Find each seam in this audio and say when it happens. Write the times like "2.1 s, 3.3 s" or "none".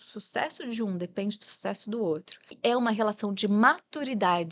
2.5 s